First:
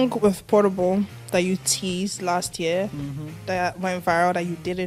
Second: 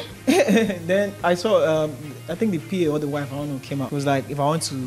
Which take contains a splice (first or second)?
second